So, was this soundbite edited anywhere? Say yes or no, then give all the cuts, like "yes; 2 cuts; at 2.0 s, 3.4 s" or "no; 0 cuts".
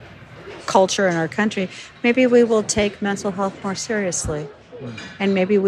no; 0 cuts